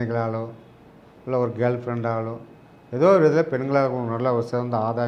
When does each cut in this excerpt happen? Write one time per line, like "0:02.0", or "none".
none